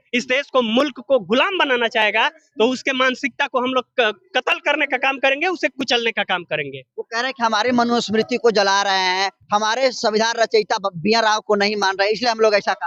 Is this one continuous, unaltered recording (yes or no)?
yes